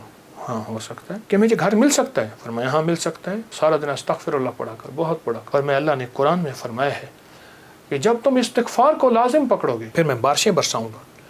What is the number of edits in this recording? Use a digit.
4